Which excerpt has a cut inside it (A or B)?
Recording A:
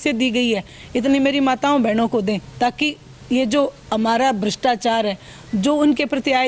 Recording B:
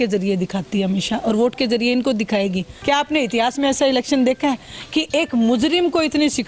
B